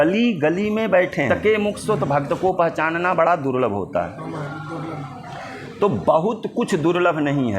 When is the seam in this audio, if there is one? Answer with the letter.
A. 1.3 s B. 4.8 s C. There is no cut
A